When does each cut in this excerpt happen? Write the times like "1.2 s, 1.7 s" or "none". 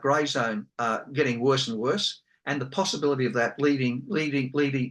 none